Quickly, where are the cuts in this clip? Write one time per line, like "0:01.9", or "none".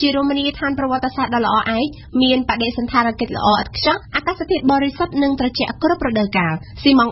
none